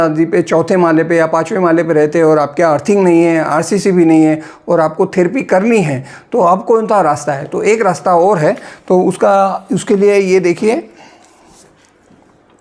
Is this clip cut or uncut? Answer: uncut